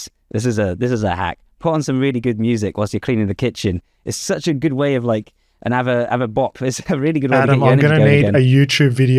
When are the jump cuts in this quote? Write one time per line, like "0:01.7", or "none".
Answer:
none